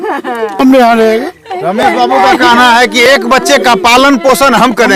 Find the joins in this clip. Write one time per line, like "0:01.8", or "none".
none